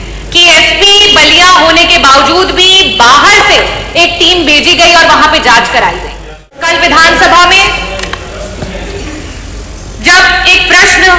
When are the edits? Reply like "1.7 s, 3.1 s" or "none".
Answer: 6.6 s